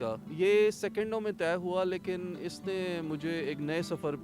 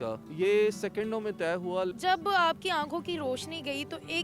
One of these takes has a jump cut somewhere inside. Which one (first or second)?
second